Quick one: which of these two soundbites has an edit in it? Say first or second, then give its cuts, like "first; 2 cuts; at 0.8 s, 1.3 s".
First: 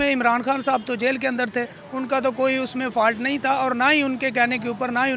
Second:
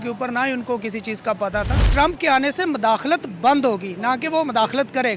second; 1 cut; at 1.9 s